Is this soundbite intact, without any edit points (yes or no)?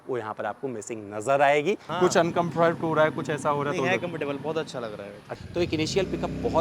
no